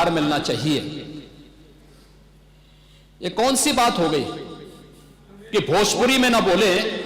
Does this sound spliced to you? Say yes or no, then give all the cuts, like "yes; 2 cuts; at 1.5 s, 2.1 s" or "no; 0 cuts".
no; 0 cuts